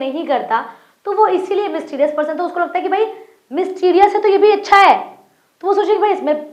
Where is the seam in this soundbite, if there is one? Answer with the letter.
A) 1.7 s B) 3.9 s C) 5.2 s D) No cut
D